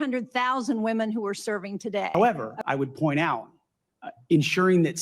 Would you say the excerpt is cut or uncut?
cut